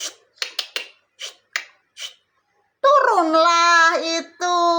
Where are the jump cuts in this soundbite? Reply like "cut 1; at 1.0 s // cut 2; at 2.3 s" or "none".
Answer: none